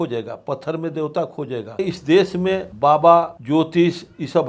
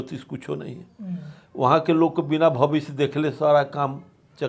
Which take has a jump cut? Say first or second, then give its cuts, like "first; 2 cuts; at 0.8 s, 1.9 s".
first; 3 cuts; at 1.8 s, 2.7 s, 3.4 s